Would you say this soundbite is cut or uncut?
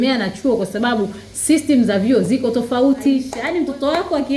cut